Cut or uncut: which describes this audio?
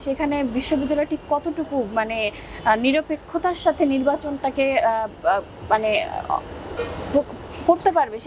uncut